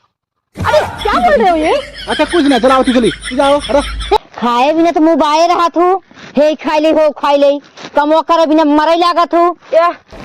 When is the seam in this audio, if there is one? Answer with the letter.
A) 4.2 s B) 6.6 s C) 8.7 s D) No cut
A